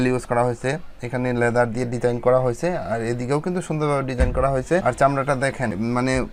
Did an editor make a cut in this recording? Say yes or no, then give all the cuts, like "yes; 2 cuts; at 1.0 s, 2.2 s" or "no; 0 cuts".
no; 0 cuts